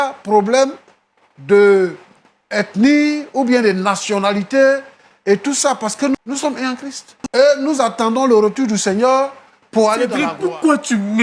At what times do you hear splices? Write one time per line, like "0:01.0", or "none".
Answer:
0:10.1